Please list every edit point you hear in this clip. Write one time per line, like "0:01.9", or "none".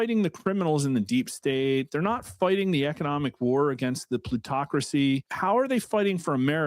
0:05.3